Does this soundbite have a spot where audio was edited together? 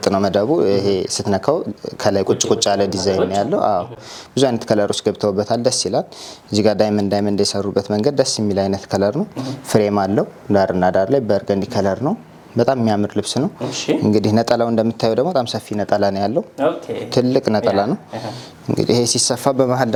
no; 0 cuts

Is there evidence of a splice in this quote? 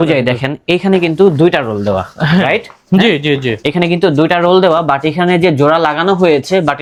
no; 0 cuts

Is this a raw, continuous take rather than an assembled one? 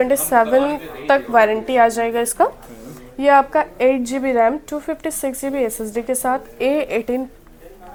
yes; 0 cuts

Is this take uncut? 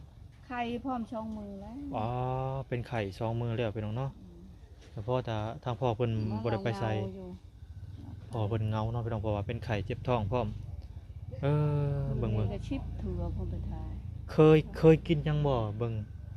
yes; 0 cuts

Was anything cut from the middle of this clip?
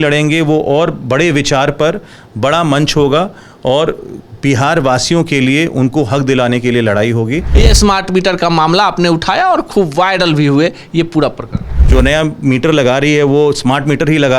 yes; 2 cuts; at 7.5 s, 11.7 s

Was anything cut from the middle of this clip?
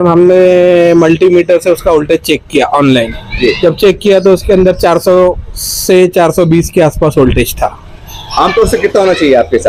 no; 0 cuts

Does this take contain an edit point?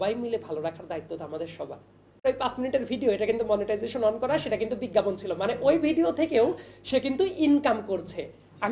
yes; 1 cut; at 2.2 s

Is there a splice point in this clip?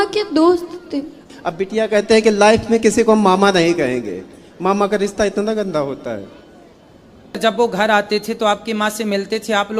yes; 2 cuts; at 1.2 s, 7.4 s

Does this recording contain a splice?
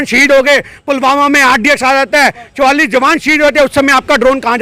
no; 0 cuts

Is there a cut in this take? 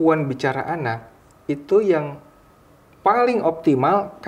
no; 0 cuts

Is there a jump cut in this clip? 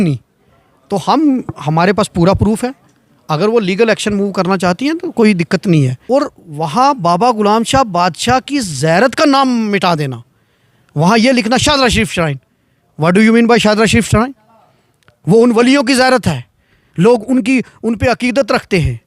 yes; 1 cut; at 6.0 s

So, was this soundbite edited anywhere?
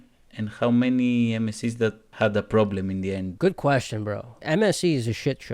yes; 3 cuts; at 2.1 s, 3.3 s, 4.3 s

